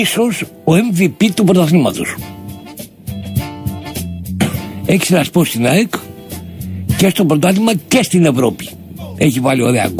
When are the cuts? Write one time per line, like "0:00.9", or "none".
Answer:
0:02.7